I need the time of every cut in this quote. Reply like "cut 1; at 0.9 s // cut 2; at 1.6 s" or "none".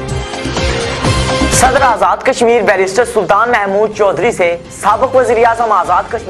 cut 1; at 1.6 s